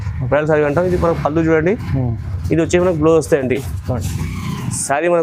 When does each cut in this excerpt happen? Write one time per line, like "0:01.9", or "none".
none